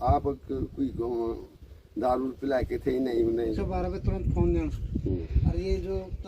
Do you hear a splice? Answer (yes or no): yes